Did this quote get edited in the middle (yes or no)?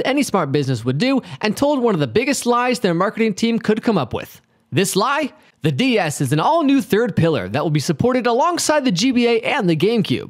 no